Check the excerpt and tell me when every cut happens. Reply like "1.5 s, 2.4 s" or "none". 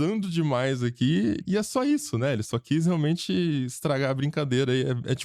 1.4 s